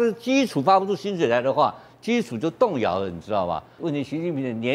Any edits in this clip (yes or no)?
yes